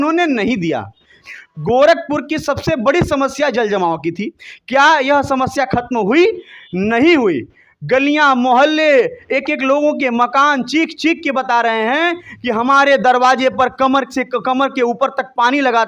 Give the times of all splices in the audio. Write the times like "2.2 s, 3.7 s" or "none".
1.3 s